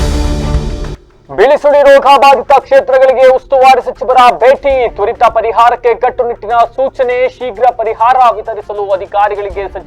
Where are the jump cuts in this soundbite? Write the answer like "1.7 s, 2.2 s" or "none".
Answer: 1.0 s